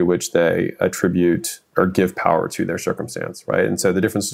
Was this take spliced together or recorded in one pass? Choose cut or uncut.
cut